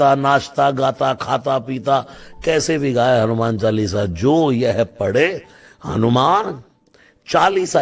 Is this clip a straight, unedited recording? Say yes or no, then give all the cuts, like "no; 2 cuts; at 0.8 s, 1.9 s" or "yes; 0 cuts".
yes; 0 cuts